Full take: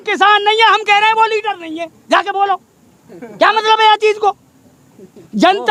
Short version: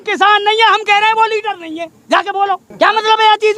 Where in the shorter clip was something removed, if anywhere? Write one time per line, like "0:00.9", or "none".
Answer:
0:02.7